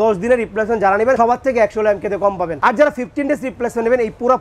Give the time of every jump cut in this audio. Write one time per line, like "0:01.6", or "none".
0:01.2
0:02.5